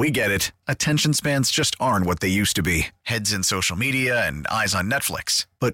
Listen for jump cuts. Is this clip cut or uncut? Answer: uncut